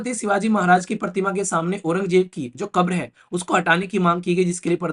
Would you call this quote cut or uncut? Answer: uncut